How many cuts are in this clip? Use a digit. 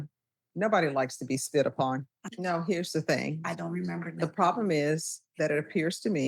1